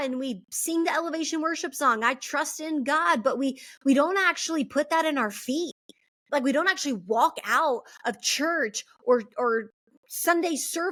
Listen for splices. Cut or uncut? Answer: uncut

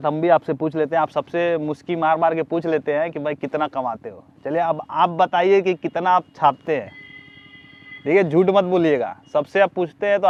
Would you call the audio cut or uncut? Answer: uncut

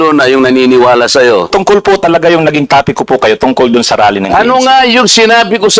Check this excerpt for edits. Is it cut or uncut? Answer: cut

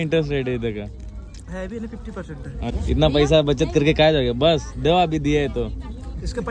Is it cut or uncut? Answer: cut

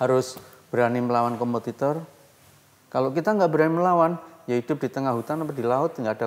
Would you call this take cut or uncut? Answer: uncut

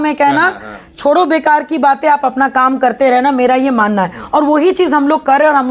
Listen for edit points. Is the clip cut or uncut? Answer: uncut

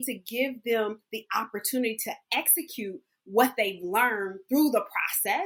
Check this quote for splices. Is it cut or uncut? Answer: uncut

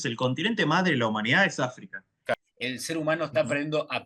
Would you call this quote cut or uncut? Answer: cut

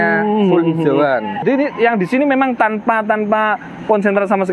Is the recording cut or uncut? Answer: cut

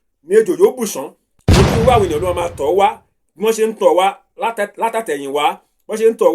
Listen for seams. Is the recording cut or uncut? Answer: cut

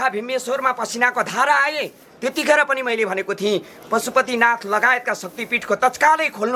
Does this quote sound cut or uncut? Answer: uncut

